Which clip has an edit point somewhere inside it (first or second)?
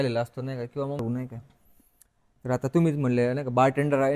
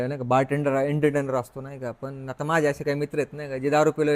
first